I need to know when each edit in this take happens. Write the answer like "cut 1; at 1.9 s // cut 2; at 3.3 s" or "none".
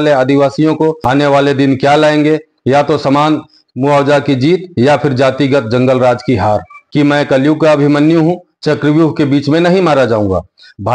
cut 1; at 1.0 s // cut 2; at 6.8 s